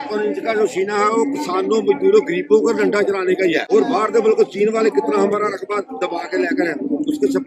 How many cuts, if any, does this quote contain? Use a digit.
1